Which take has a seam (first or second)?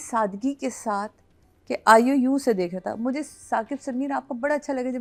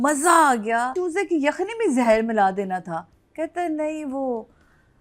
second